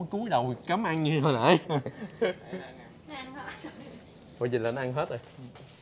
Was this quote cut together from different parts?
no; 0 cuts

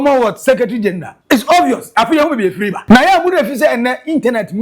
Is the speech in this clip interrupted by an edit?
yes; 2 cuts; at 1.1 s, 2.8 s

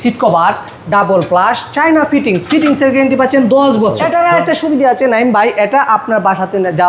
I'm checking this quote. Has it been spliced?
yes; 1 cut; at 4.0 s

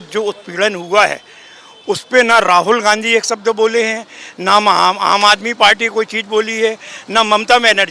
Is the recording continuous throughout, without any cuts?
yes; 0 cuts

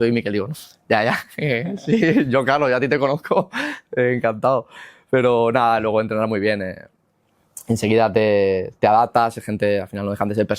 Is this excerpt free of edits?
yes; 0 cuts

